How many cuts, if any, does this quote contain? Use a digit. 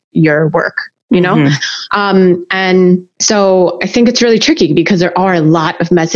1